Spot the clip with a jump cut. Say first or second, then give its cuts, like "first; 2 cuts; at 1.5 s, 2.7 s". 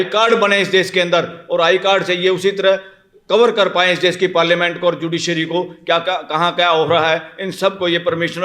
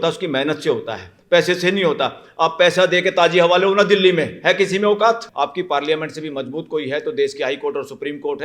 second; 1 cut; at 5.3 s